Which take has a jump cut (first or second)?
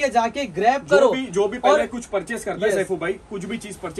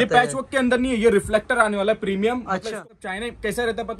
second